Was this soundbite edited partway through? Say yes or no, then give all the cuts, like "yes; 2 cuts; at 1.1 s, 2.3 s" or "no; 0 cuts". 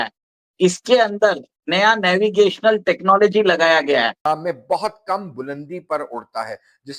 yes; 1 cut; at 4.2 s